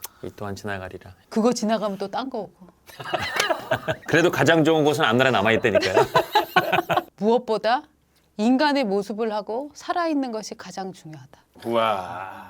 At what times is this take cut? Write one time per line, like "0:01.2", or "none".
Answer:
0:04.0
0:07.1